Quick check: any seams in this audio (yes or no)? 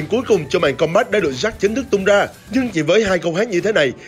no